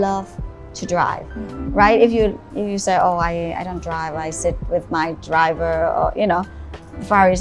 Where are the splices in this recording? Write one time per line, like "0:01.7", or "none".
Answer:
none